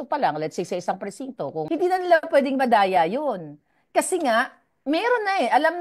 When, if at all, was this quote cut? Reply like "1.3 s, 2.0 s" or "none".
1.6 s